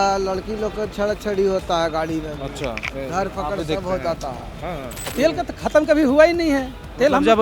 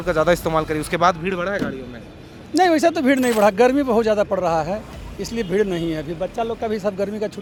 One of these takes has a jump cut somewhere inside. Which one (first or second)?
first